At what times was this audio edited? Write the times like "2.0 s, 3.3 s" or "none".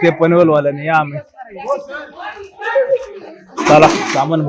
none